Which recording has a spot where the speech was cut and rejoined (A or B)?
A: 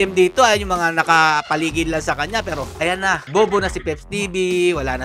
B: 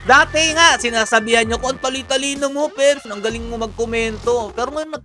A